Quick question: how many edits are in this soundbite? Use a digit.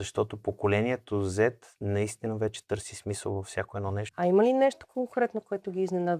1